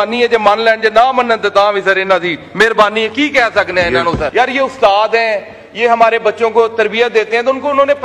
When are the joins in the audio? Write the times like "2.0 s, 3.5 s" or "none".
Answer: 4.3 s